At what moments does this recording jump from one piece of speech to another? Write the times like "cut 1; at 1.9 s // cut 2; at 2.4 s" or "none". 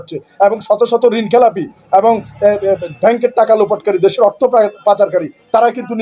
none